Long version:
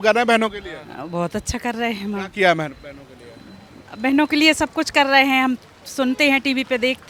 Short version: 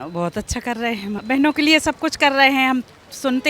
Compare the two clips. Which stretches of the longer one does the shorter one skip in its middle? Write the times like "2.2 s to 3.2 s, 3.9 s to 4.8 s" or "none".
2.2 s to 3.9 s